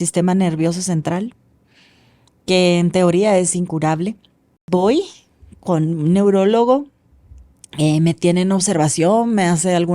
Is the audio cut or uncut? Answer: cut